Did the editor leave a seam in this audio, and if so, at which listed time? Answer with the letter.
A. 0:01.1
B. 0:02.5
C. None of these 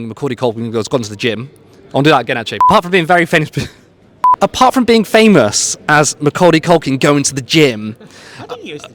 B